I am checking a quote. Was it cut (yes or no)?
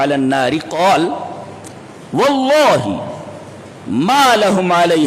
no